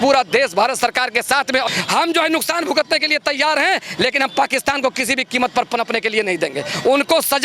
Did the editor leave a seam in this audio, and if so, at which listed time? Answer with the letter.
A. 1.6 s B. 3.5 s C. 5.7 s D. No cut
A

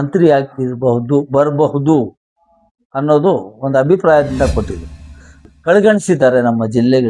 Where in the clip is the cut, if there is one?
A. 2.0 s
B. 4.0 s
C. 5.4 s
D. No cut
C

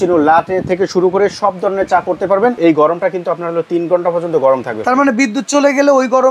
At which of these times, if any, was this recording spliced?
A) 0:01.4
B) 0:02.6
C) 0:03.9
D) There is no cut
B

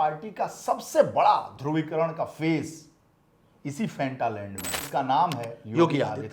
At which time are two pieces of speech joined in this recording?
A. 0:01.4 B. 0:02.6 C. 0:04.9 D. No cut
C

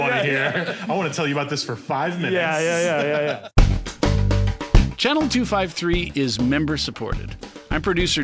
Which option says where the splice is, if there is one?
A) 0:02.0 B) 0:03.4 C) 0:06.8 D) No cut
B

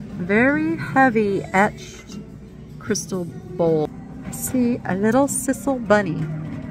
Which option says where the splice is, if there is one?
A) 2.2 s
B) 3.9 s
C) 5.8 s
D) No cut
B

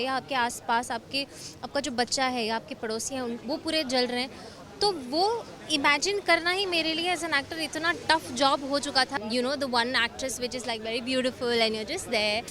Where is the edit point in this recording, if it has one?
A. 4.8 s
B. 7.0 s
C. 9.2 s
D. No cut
C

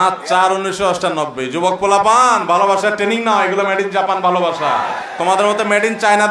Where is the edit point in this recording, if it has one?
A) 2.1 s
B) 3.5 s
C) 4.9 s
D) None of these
C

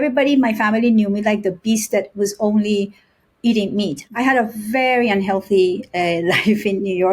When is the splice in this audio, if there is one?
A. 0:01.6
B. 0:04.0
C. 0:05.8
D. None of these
B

